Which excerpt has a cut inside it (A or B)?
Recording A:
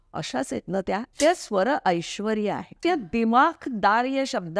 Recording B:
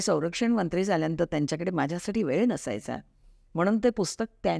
A